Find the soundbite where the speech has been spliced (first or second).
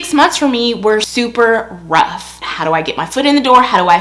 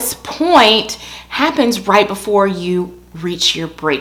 first